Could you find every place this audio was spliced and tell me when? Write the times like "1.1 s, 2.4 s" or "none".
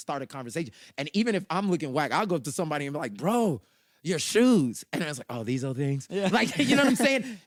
none